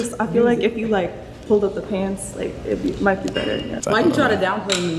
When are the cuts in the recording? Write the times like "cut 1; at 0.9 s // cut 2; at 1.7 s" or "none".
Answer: cut 1; at 2.1 s // cut 2; at 3.8 s

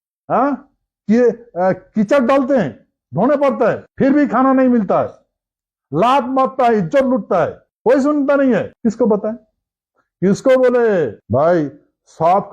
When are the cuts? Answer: cut 1; at 3.9 s // cut 2; at 7.6 s // cut 3; at 8.7 s // cut 4; at 11.2 s

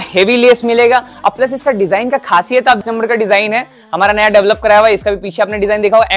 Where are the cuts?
cut 1; at 2.8 s

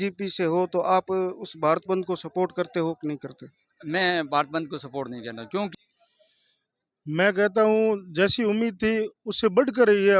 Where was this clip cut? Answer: cut 1; at 5.7 s

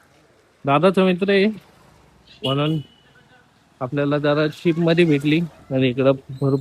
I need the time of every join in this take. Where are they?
none

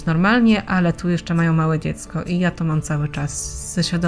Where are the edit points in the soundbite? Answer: none

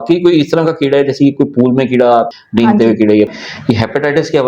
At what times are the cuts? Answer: cut 1; at 3.4 s

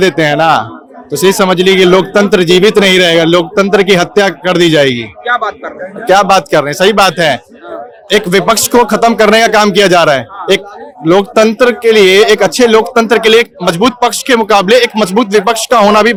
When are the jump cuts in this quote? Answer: none

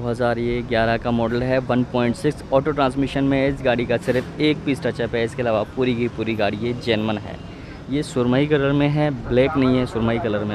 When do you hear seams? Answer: none

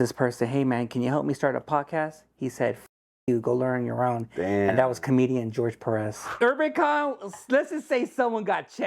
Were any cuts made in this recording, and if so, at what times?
cut 1; at 6.4 s

